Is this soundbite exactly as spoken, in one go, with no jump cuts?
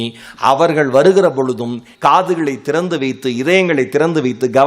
no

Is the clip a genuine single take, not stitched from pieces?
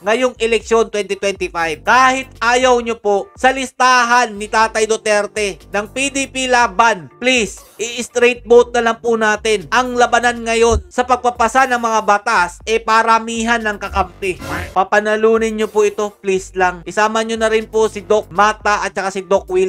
yes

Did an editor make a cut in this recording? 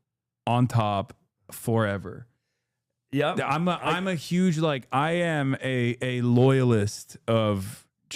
no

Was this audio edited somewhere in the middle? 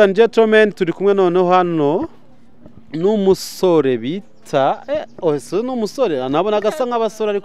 no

